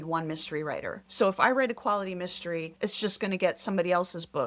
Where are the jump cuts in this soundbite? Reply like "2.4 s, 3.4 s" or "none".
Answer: 1.0 s, 2.7 s